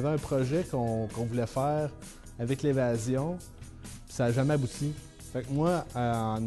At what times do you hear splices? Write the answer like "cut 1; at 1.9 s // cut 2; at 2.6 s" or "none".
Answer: none